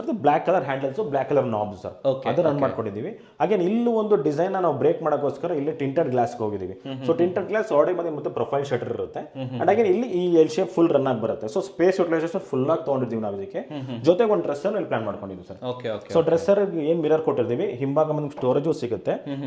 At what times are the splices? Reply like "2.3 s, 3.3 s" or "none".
none